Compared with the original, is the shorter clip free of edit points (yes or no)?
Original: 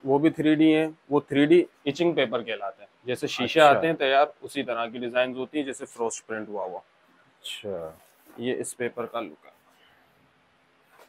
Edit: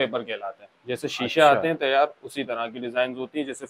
yes